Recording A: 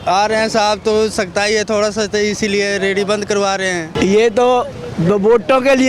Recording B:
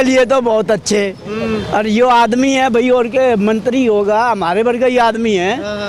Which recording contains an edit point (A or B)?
A